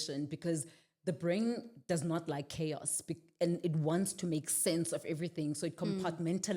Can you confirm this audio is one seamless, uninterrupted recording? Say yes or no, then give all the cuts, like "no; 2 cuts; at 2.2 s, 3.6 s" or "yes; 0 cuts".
yes; 0 cuts